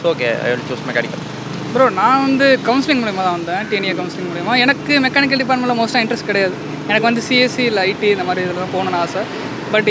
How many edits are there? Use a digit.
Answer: 0